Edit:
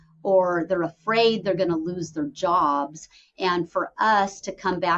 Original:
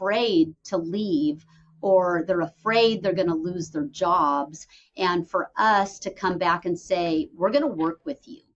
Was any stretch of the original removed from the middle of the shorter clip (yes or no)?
no